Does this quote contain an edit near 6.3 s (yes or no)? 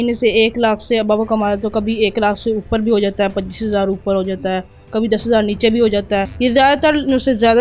yes